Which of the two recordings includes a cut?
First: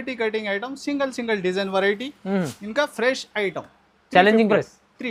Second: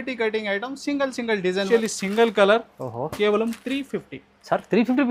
second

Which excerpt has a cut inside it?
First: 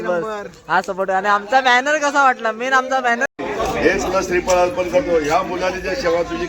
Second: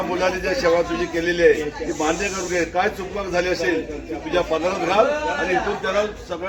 first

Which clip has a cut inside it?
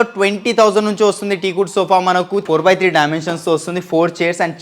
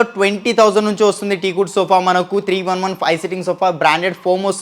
first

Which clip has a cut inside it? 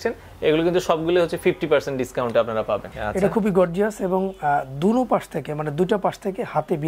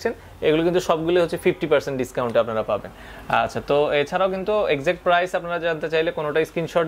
first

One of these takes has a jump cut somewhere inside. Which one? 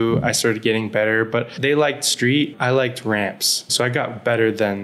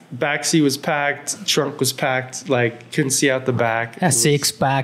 first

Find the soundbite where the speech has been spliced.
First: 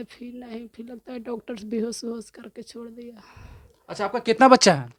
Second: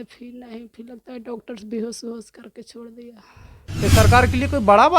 second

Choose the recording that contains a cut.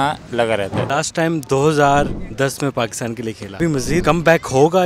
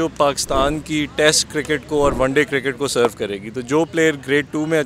first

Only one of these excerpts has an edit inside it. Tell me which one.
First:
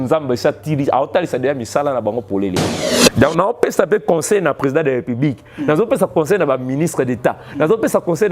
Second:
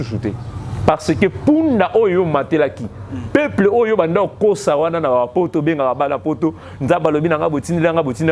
first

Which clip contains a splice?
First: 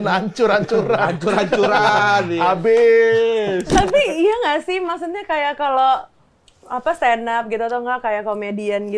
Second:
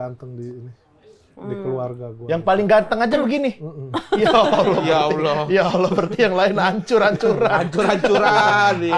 first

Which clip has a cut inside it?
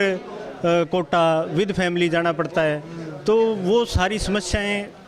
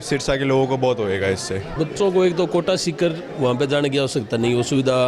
second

